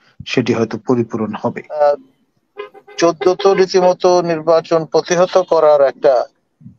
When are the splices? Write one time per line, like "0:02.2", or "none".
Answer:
0:01.8